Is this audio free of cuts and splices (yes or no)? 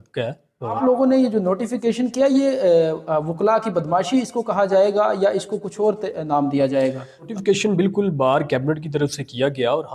no